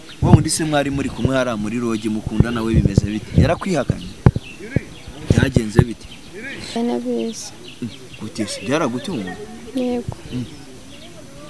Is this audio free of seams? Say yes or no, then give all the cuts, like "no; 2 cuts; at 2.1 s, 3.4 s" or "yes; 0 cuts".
no; 1 cut; at 6.8 s